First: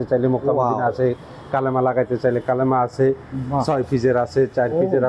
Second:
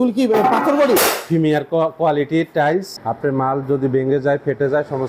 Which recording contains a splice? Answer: second; 1 cut; at 2.9 s

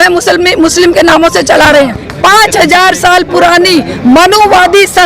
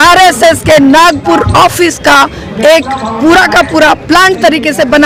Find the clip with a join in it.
first; 1 cut; at 2.0 s

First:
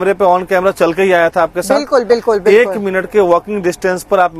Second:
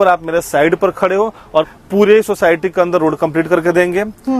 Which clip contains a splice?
second; 1 cut; at 1.7 s

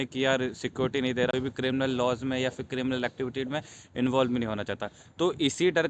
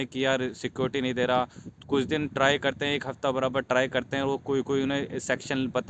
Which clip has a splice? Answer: first; 1 cut; at 1.3 s

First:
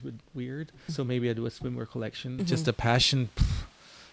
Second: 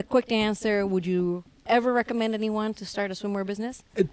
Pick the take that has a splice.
first; 2 cuts; at 0.9 s, 2.3 s

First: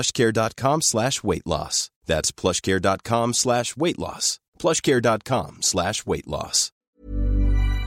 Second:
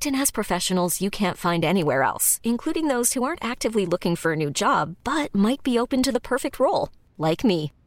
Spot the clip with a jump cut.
first; 1 cut; at 6.7 s

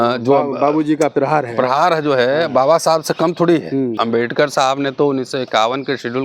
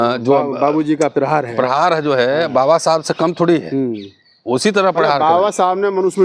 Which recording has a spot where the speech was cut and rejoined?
first; 1 cut; at 3.9 s

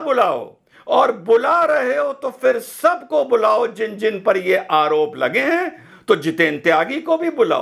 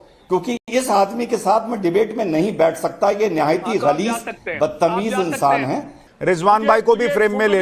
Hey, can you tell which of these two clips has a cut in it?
second; 1 cut; at 5.9 s

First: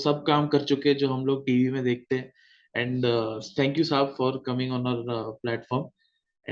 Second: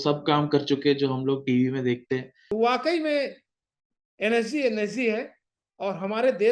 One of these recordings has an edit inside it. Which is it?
second; 1 cut; at 2.4 s

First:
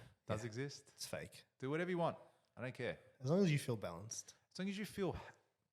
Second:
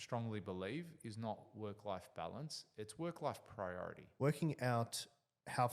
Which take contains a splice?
second; 1 cut; at 4.0 s

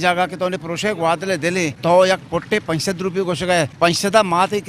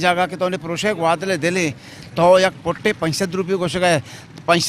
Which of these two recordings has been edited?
first; 2 cuts; at 1.8 s, 3.7 s

